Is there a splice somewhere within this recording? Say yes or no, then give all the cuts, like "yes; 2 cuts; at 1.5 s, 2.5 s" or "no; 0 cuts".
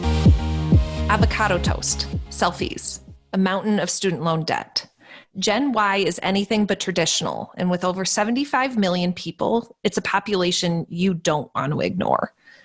yes; 1 cut; at 1.0 s